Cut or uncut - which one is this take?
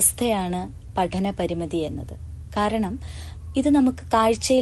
uncut